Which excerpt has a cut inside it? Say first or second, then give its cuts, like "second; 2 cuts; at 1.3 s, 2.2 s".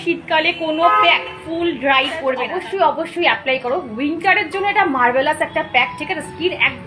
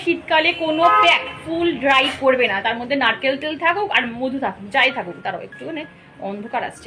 first; 1 cut; at 2.4 s